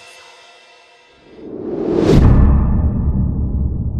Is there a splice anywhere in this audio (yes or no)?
yes